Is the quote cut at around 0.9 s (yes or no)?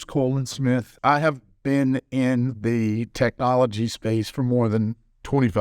yes